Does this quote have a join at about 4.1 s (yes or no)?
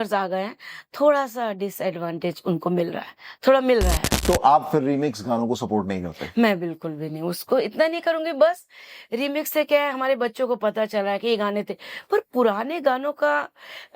yes